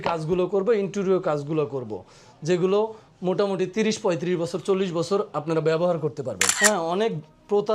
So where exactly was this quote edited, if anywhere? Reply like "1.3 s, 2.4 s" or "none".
6.5 s

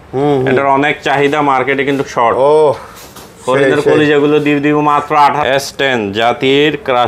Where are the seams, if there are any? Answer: 5.4 s

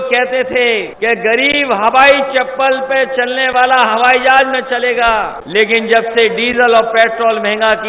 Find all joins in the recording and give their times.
0.9 s, 5.4 s

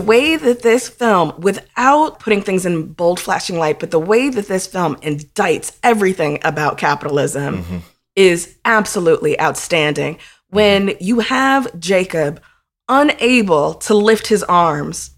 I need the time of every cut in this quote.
2.1 s

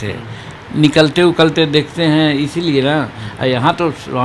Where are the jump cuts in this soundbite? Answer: none

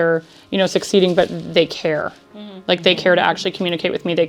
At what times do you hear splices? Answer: none

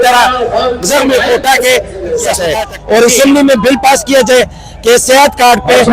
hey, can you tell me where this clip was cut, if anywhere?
2.5 s

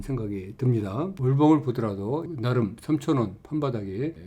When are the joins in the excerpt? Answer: 1.2 s, 2.3 s

